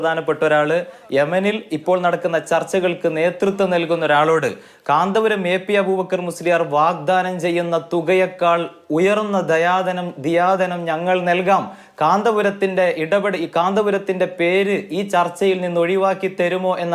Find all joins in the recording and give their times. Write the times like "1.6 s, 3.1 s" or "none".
none